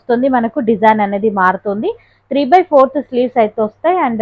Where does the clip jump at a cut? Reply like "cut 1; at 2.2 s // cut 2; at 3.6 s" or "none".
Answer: none